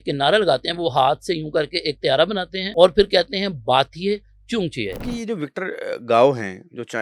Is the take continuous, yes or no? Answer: no